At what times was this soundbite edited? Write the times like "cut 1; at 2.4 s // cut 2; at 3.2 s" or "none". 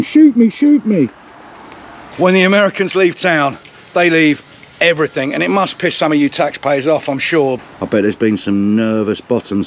cut 1; at 2.0 s // cut 2; at 7.6 s